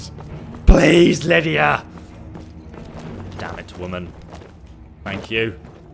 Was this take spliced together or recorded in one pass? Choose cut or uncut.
uncut